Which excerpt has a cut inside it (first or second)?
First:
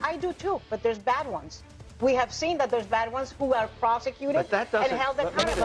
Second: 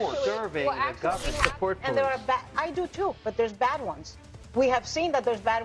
second